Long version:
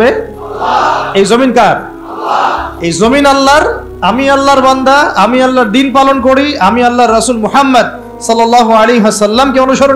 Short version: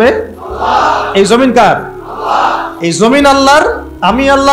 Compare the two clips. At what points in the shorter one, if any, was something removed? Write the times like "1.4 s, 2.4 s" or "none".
none